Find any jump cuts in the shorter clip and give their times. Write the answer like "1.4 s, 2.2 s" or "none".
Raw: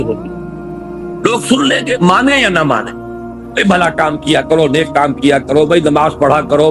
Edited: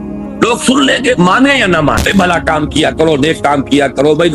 2.0 s